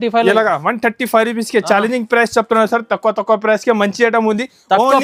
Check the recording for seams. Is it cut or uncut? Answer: uncut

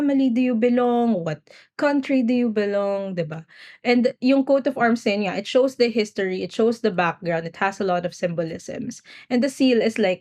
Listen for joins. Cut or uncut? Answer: uncut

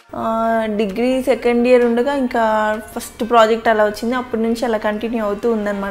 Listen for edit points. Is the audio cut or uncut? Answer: uncut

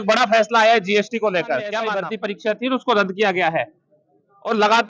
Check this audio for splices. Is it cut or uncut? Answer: cut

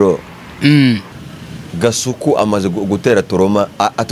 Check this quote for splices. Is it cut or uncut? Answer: cut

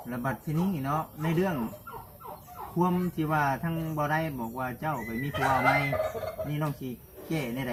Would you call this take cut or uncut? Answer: uncut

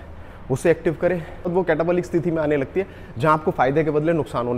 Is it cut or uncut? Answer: cut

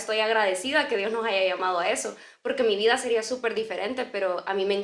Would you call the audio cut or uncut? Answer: uncut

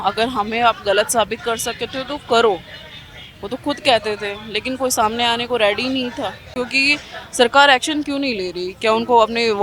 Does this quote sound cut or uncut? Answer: cut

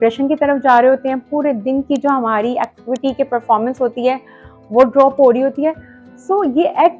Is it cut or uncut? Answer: uncut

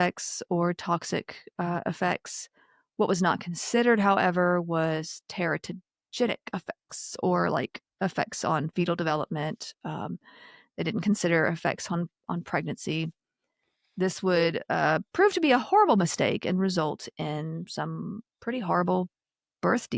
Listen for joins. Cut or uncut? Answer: uncut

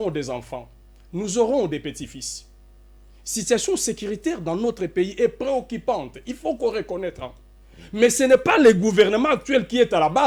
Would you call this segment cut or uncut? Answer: uncut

